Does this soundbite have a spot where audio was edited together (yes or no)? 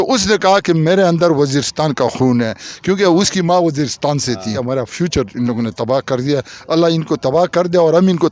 yes